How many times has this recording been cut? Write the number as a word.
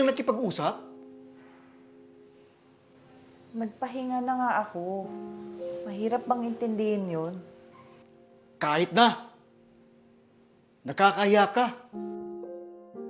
one